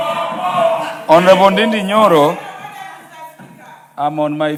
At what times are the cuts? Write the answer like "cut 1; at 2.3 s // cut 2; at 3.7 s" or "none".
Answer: none